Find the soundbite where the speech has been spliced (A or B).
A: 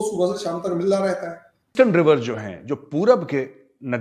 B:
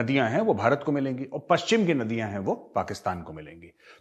A